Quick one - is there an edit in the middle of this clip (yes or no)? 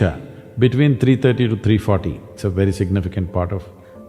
yes